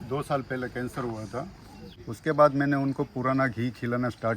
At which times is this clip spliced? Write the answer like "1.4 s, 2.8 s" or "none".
2.0 s